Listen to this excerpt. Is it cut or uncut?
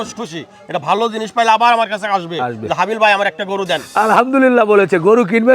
cut